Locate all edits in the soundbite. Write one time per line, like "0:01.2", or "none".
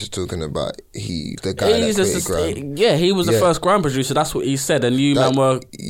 0:01.4